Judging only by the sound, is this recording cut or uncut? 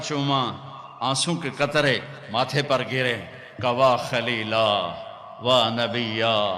uncut